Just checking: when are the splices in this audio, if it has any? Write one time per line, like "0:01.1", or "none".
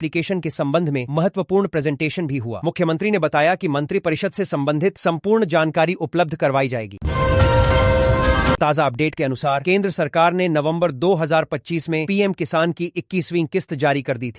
0:06.9
0:08.6
0:09.6